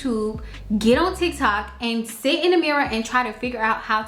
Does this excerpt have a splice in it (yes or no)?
no